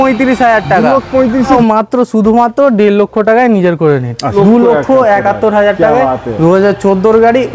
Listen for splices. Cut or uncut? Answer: cut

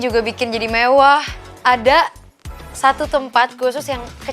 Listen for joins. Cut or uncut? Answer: cut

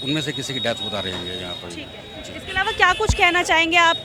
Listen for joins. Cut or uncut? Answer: uncut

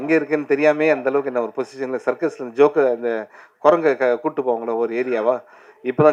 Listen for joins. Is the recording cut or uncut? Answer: uncut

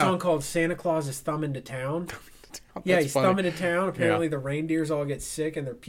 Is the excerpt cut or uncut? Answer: uncut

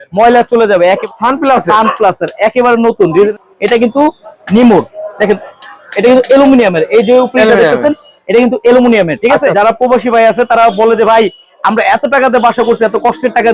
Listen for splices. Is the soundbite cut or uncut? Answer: cut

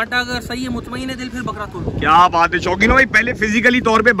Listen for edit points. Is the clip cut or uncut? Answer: uncut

